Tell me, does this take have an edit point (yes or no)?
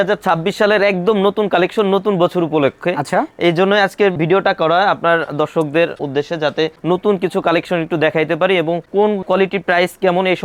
no